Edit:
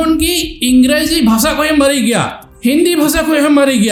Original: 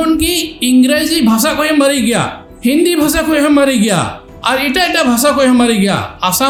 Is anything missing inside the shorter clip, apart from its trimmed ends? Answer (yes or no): no